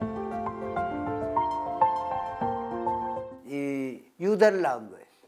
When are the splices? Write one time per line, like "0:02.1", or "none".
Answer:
0:03.0